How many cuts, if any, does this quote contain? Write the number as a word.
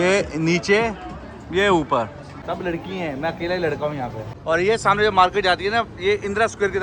two